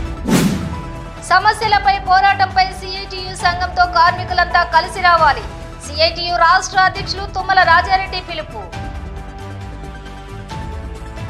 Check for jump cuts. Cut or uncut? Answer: uncut